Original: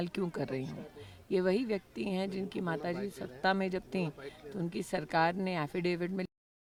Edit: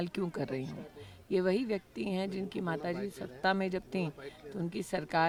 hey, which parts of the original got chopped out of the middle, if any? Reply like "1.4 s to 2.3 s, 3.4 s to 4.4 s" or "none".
none